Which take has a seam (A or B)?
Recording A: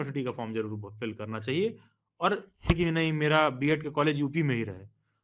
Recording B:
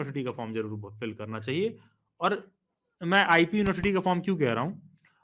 A